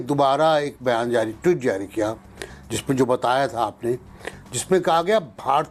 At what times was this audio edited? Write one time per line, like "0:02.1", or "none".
none